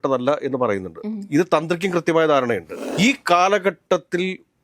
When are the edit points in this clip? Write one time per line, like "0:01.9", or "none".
0:02.8